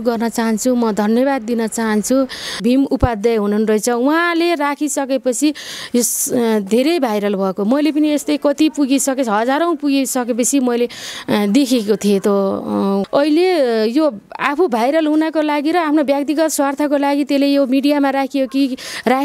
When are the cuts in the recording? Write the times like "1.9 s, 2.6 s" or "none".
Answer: 2.6 s, 13.0 s